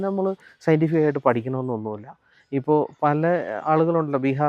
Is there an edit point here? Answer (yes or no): no